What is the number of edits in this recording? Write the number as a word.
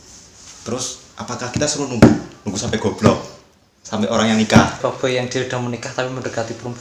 one